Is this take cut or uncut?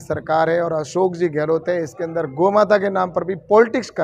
uncut